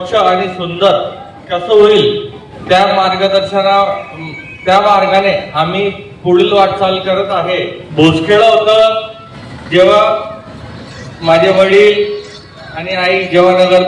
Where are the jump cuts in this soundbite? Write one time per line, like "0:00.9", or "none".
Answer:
0:07.8